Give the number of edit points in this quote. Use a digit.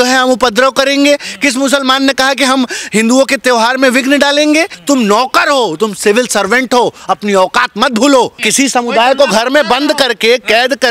2